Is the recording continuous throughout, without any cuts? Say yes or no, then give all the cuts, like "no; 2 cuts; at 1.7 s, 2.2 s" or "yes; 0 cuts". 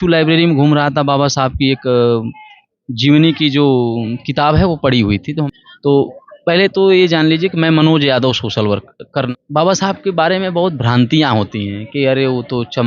no; 2 cuts; at 5.4 s, 9.3 s